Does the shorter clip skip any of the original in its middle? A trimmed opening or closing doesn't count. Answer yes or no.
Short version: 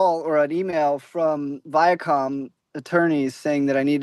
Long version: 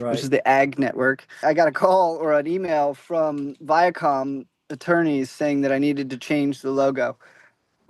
no